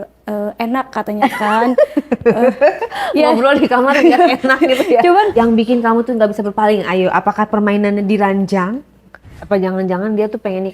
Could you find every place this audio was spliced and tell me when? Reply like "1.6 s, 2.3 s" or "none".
5.3 s, 9.3 s